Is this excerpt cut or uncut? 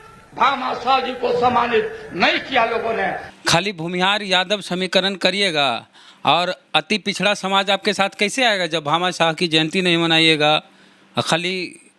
cut